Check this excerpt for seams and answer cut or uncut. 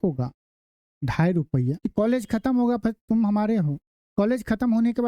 cut